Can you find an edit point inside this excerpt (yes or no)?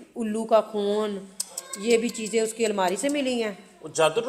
no